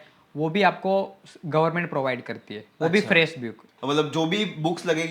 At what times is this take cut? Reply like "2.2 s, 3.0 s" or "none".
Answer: 3.7 s